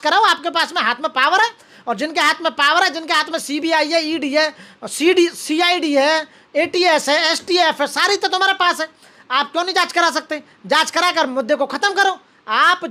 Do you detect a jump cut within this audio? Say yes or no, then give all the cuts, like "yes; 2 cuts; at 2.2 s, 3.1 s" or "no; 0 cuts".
no; 0 cuts